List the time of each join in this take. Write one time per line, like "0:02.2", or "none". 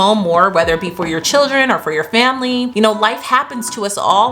0:02.7